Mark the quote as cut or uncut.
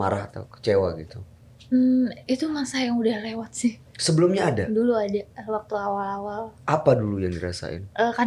uncut